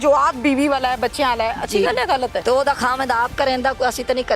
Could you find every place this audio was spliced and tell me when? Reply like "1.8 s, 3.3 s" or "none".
2.4 s